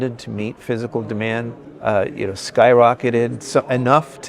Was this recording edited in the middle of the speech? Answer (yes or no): yes